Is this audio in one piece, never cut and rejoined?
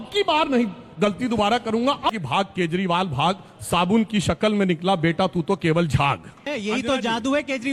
no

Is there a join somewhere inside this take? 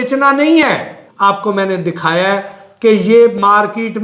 yes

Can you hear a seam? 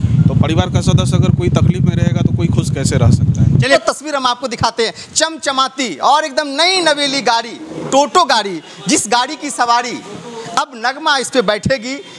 yes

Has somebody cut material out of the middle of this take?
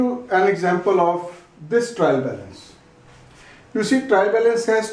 yes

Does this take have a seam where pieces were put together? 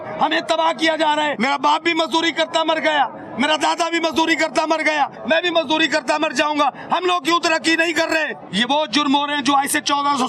yes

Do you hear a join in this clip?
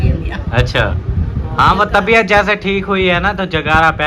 no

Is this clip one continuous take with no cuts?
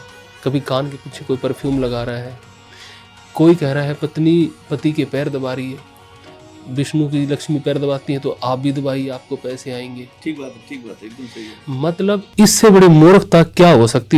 yes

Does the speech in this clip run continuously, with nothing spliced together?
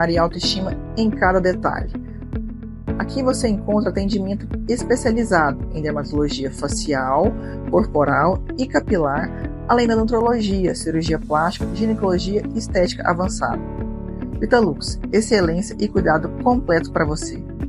yes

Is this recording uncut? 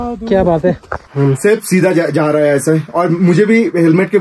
no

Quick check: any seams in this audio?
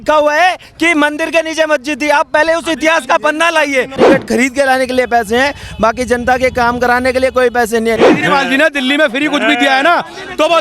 yes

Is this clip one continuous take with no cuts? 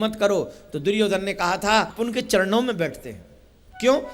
no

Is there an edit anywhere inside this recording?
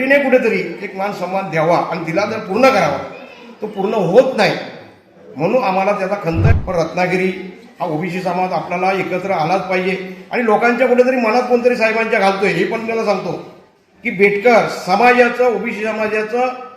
yes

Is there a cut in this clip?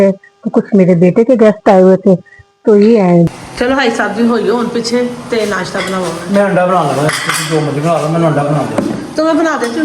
yes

